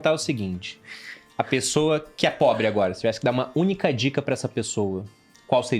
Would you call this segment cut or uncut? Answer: uncut